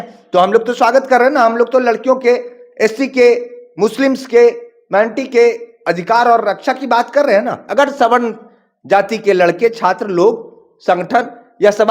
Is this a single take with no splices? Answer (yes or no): no